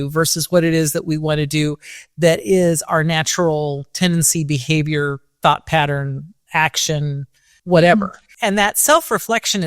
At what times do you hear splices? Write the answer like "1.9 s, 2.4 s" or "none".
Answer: 7.5 s, 8.3 s